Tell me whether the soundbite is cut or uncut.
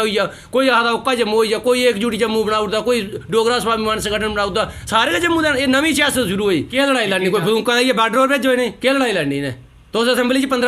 cut